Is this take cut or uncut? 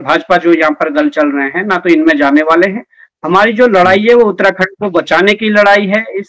uncut